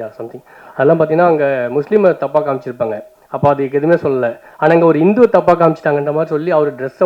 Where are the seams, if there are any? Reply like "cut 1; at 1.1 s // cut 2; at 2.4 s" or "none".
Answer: none